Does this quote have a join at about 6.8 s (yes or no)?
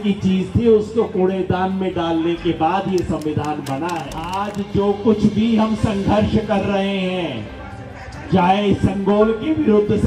no